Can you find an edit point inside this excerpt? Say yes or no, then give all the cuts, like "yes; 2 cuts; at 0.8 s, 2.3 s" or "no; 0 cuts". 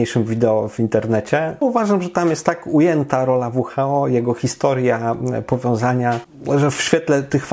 yes; 2 cuts; at 1.6 s, 6.3 s